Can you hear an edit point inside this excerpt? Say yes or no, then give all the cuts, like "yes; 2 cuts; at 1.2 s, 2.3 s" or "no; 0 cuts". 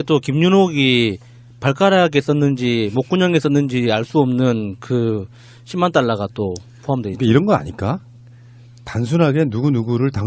no; 0 cuts